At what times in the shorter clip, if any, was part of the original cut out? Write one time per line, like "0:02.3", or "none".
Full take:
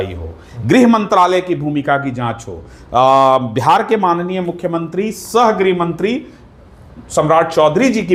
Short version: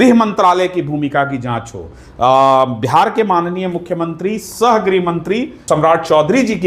0:05.5